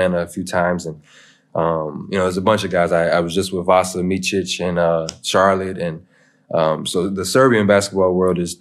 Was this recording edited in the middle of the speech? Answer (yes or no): no